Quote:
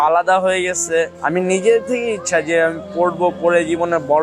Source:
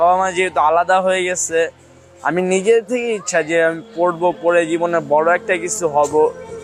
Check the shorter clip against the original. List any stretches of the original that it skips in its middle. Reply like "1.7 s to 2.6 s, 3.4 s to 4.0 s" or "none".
1.8 s to 2.2 s